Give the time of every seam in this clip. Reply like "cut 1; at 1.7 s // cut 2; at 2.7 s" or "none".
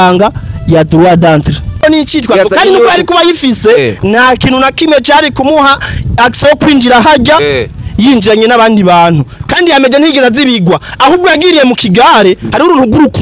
cut 1; at 1.8 s